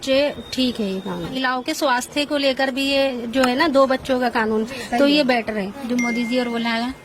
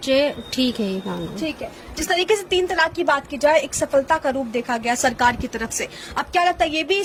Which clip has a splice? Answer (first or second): first